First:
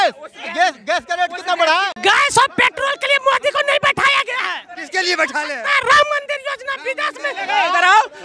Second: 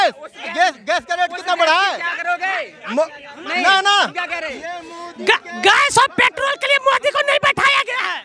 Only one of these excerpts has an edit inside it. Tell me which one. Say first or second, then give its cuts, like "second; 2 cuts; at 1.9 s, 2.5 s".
first; 2 cuts; at 1.9 s, 7.4 s